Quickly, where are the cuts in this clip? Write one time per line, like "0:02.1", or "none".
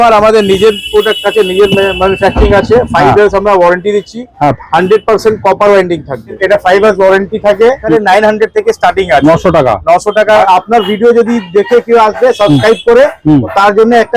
0:06.4
0:07.8
0:10.4